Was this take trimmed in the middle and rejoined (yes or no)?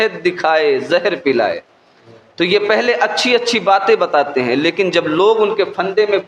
no